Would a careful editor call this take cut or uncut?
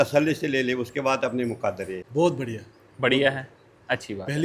cut